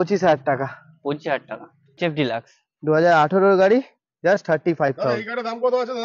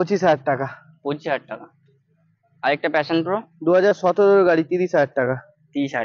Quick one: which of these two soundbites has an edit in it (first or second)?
first